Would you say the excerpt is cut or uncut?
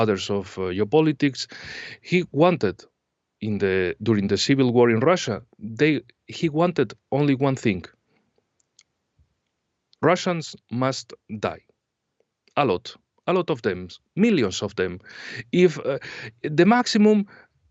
uncut